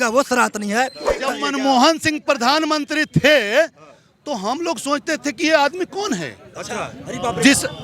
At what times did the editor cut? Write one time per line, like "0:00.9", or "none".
0:01.2